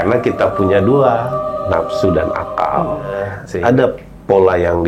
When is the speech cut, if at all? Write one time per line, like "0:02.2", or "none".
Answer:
0:03.4

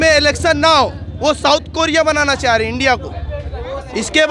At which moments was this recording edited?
none

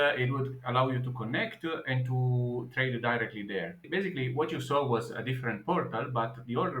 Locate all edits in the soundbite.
0:03.8

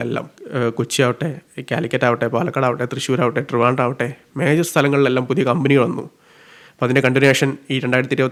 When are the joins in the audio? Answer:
none

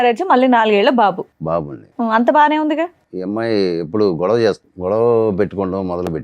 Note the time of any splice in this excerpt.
0:03.1
0:04.7

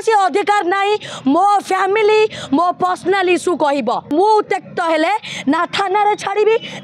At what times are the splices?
0:04.1

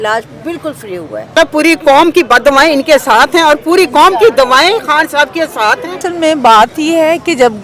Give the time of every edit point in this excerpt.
0:01.4
0:06.0

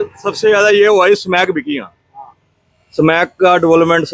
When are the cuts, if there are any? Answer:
none

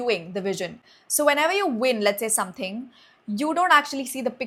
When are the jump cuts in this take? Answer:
none

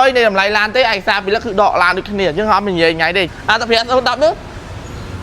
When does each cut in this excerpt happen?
0:03.3

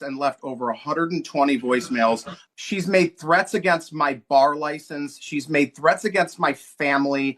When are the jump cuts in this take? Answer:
0:02.3

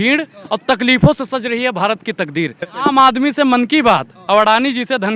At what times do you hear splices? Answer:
0:02.7

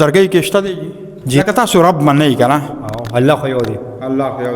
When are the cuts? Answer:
0:01.4

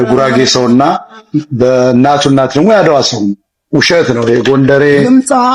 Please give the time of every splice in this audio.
none

